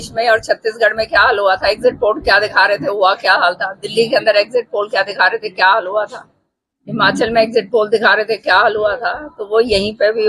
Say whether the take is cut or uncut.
uncut